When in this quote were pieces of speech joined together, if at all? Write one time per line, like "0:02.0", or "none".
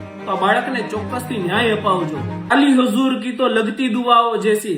0:02.5